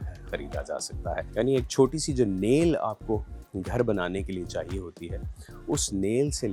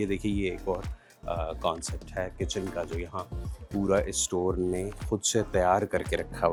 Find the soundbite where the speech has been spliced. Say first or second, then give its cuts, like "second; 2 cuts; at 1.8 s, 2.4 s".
first; 1 cut; at 1.3 s